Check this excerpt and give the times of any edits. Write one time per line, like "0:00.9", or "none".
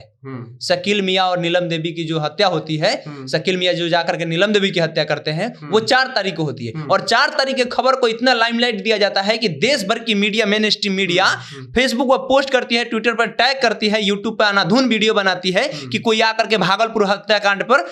none